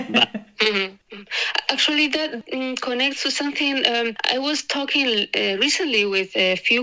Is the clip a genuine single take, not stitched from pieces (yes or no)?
no